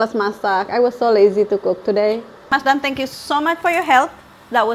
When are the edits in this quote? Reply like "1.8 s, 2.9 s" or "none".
2.5 s